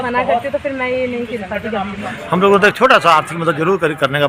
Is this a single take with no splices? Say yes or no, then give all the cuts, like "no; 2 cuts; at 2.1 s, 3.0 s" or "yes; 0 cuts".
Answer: no; 1 cut; at 2.1 s